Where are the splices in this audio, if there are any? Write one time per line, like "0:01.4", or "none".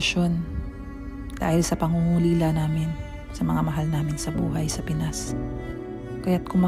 none